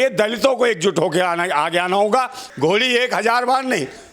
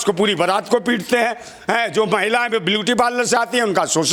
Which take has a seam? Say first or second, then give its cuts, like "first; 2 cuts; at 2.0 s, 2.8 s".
first; 1 cut; at 2.4 s